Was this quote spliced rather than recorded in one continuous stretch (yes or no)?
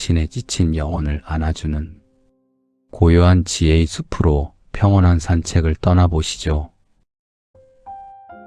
yes